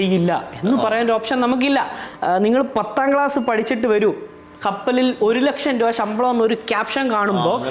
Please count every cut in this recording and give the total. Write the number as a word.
one